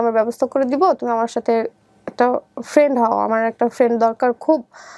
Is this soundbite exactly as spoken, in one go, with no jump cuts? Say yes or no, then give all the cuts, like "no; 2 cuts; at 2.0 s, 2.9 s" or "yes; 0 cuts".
yes; 0 cuts